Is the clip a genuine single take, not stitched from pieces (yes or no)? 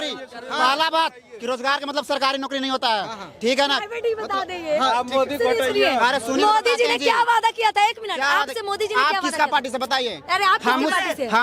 yes